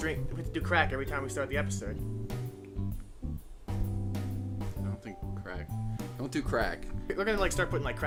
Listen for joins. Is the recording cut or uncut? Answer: uncut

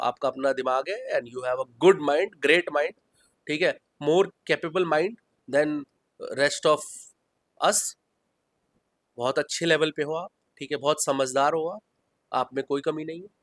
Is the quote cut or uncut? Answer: uncut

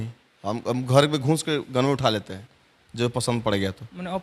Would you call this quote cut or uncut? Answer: uncut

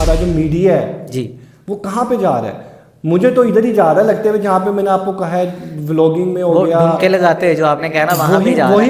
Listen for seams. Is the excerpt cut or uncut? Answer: uncut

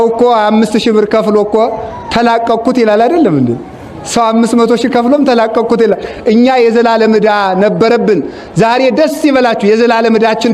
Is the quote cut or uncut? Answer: uncut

